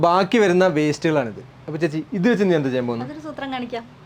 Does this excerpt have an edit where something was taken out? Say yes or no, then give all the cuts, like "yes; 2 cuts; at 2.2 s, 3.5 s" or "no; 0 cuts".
no; 0 cuts